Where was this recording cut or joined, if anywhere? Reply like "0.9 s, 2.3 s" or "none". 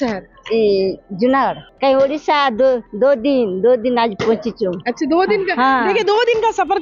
1.7 s